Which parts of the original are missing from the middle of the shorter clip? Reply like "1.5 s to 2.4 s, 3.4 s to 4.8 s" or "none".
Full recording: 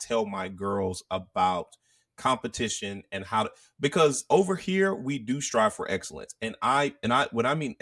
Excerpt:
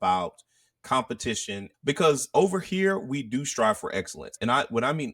3.0 s to 3.7 s, 6.3 s to 7.0 s